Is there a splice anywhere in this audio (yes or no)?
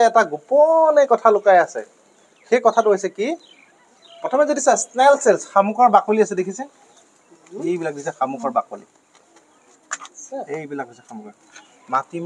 no